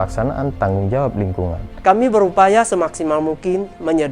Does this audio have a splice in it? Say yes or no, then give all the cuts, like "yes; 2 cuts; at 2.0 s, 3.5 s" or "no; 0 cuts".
yes; 1 cut; at 1.6 s